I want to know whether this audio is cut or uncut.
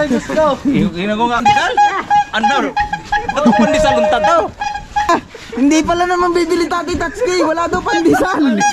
cut